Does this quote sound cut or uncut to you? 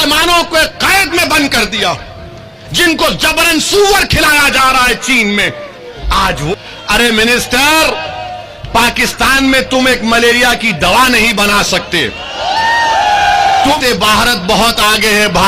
cut